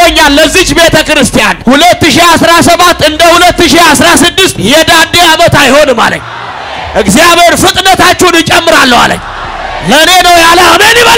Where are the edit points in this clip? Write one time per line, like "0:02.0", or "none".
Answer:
0:01.5
0:04.6